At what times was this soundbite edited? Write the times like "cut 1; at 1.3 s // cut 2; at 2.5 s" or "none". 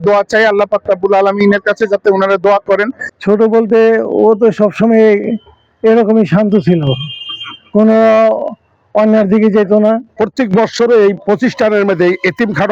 cut 1; at 3.1 s // cut 2; at 10.1 s